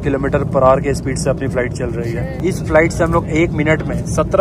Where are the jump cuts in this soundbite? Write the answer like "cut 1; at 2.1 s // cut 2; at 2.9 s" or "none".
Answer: none